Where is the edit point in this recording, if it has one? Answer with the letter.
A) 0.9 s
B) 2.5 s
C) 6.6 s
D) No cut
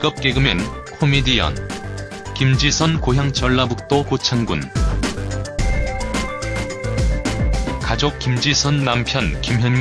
C